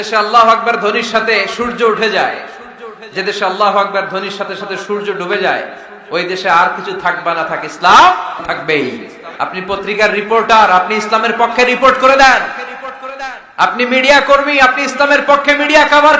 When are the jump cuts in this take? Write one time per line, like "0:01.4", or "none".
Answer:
0:08.4
0:09.3